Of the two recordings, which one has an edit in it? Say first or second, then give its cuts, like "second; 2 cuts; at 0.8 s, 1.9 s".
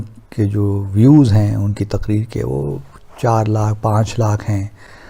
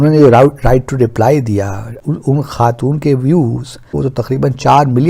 second; 2 cuts; at 1.9 s, 3.9 s